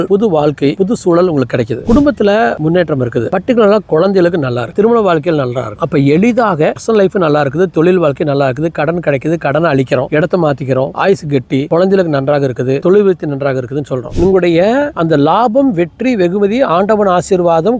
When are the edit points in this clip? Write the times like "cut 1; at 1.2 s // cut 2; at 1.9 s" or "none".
cut 1; at 3.3 s // cut 2; at 4.7 s // cut 3; at 5.7 s // cut 4; at 6.8 s // cut 5; at 14.1 s